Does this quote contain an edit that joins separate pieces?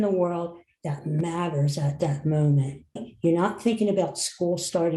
yes; 1 cut; at 3.1 s

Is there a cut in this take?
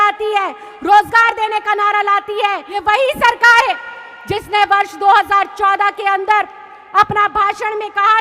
yes; 1 cut; at 2.7 s

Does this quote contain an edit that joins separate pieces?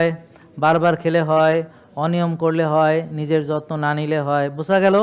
no; 0 cuts

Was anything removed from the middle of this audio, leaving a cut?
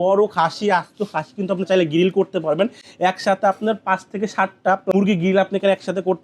yes; 1 cut; at 4.9 s

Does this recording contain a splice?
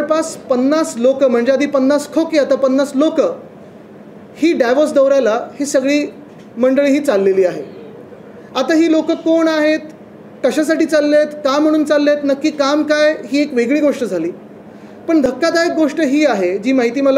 no; 0 cuts

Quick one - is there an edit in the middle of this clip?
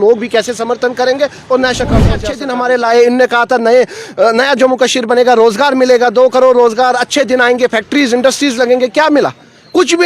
yes; 1 cut; at 2.3 s

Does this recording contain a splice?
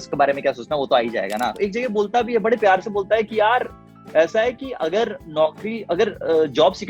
yes; 1 cut; at 1.6 s

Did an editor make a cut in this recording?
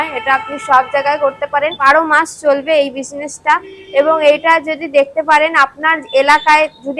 yes; 1 cut; at 1.8 s

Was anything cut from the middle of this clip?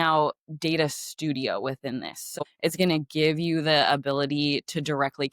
yes; 1 cut; at 2.4 s

